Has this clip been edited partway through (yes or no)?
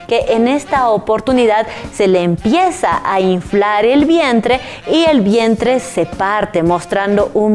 no